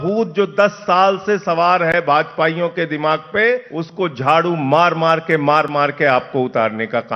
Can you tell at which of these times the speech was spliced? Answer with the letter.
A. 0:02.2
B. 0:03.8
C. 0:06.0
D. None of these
B